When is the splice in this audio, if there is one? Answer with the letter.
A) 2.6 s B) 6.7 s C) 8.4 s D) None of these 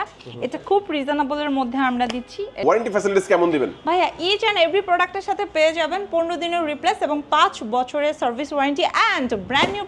A